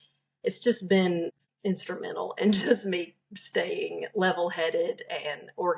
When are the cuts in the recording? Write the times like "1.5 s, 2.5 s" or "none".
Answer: 1.4 s

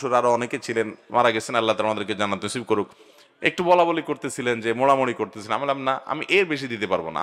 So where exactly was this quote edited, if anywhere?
none

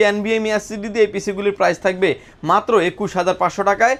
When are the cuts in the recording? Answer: none

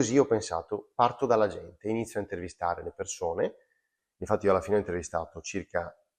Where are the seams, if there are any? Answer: 4.0 s

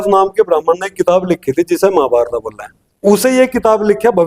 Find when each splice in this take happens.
3.0 s

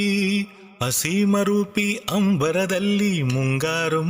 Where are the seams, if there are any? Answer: 1.0 s

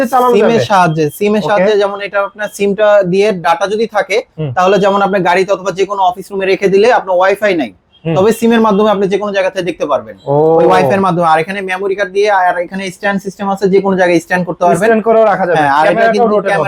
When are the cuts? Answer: none

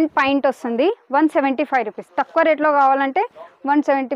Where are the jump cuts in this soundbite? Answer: none

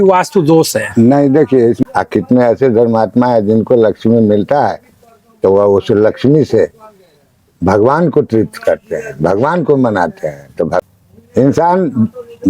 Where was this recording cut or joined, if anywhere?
1.8 s, 10.8 s

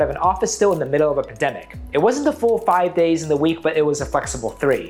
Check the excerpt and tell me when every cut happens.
none

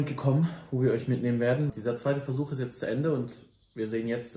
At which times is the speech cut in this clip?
1.7 s

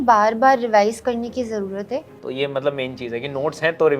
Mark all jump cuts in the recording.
2.2 s

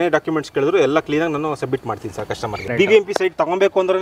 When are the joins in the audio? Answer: 2.6 s

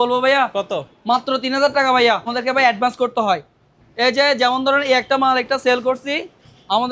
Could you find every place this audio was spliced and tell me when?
2.3 s

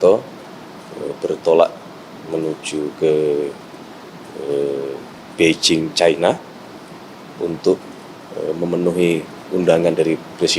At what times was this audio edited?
5.2 s

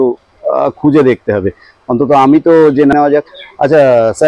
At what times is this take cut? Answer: 2.9 s

